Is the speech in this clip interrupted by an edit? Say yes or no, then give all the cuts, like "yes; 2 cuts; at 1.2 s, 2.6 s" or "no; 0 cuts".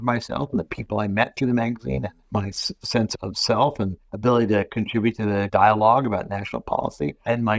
no; 0 cuts